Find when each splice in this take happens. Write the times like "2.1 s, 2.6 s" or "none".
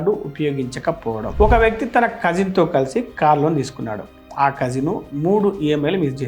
1.3 s